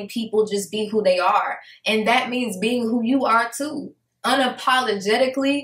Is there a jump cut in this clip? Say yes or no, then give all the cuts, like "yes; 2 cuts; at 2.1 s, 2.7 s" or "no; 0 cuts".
no; 0 cuts